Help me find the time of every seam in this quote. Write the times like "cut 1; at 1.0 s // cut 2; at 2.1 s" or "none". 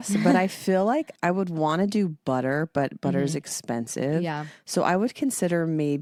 none